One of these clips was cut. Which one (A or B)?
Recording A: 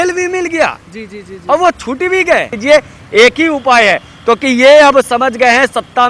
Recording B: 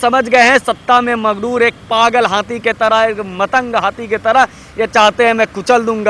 A